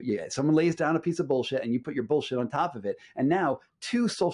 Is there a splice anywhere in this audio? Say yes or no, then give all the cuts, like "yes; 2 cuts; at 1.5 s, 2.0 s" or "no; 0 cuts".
no; 0 cuts